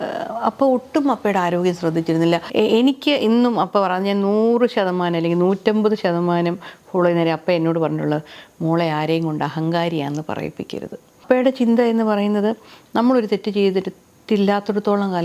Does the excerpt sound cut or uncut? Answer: cut